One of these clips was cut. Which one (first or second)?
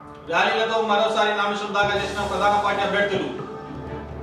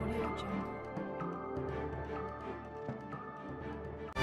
second